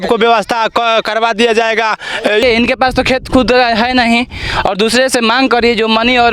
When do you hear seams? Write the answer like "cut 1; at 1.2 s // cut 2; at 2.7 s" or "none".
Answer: cut 1; at 2.4 s